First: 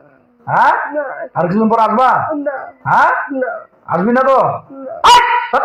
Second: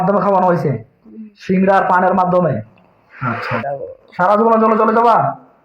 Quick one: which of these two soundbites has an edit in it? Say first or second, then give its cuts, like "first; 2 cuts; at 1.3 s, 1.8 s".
second; 1 cut; at 3.6 s